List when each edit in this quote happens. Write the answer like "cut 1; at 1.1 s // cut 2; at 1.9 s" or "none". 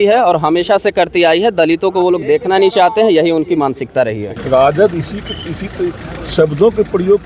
cut 1; at 4.3 s